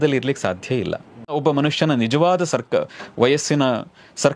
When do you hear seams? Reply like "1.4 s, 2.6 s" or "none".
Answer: 1.3 s